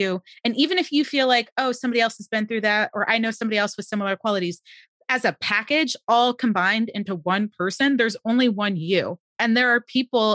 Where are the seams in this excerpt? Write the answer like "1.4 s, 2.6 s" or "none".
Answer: 9.2 s